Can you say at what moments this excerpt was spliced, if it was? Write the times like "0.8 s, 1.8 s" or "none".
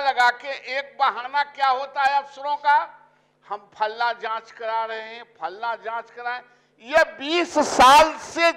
none